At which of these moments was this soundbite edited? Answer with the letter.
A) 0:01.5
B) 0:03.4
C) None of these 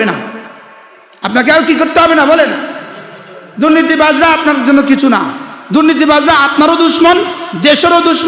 C